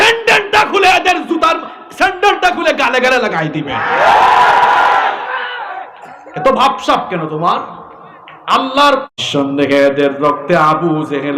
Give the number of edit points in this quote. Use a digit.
1